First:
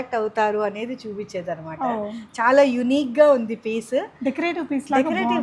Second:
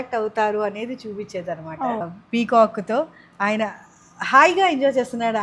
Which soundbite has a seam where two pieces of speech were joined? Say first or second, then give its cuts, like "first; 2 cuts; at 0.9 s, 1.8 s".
second; 1 cut; at 2.0 s